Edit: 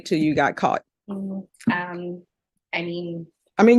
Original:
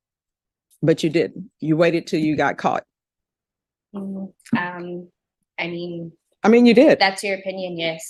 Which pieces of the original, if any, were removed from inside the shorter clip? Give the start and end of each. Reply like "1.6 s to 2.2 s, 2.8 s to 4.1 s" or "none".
3.0 s to 3.8 s